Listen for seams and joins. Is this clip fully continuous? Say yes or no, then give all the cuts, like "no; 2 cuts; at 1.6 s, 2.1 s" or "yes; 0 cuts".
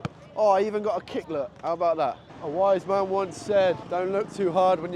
no; 2 cuts; at 2.3 s, 3.8 s